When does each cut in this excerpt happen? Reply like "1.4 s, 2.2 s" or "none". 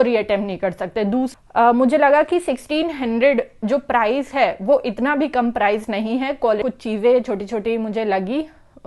1.3 s, 6.6 s